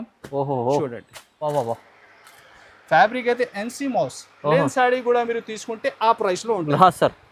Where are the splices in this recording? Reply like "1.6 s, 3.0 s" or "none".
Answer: 1.5 s